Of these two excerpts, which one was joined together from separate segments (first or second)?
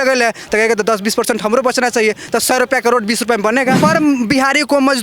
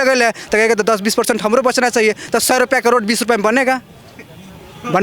first